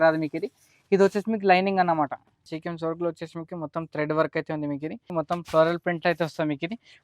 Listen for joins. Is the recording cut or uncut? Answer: cut